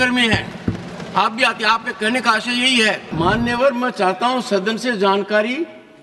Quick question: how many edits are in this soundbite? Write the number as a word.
one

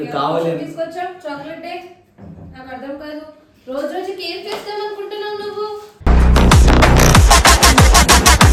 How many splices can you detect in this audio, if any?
zero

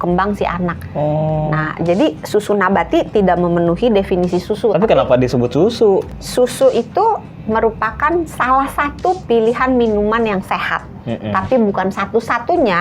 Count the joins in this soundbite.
two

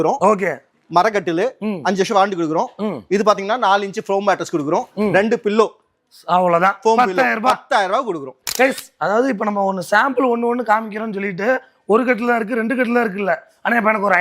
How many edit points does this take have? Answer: one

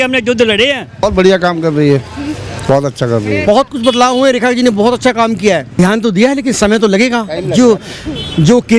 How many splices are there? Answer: three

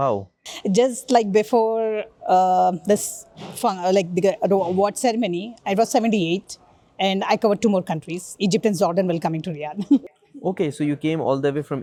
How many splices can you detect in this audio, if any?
zero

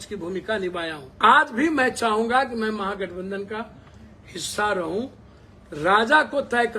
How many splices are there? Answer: one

